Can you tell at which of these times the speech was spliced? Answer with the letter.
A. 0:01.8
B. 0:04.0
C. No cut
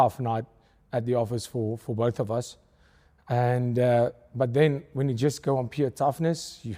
A